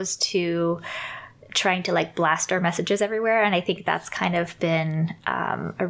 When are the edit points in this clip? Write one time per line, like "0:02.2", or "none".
none